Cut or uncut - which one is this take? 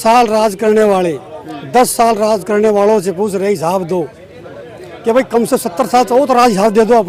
uncut